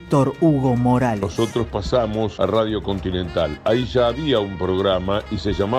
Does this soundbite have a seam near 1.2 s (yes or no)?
yes